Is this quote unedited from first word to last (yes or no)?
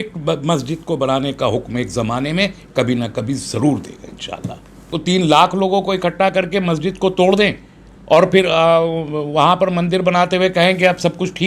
no